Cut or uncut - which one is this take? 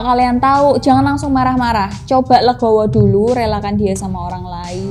uncut